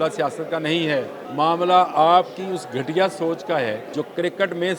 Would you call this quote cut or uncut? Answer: cut